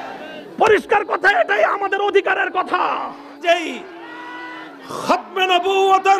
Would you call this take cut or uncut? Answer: cut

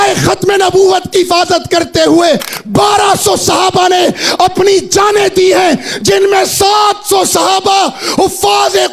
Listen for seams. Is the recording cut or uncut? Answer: uncut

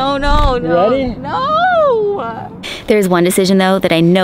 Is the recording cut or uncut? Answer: cut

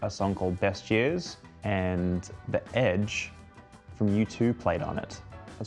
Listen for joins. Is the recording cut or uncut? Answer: uncut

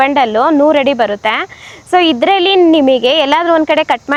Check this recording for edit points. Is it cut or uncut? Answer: uncut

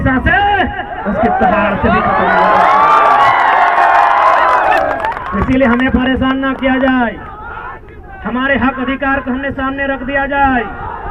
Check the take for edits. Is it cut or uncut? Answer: uncut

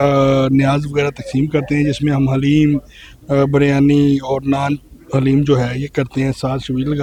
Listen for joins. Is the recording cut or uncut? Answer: uncut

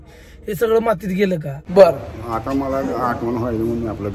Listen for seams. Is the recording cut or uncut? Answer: cut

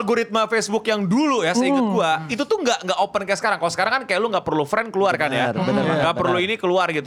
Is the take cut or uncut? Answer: uncut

